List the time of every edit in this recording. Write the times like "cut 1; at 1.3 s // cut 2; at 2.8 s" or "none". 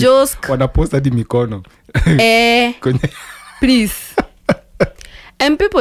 none